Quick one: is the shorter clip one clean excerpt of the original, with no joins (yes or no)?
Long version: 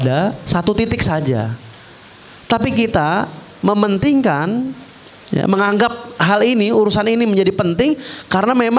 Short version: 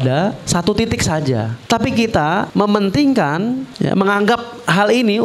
no